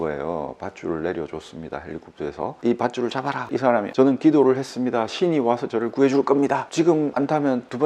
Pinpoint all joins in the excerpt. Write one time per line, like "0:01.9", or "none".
0:02.6
0:06.6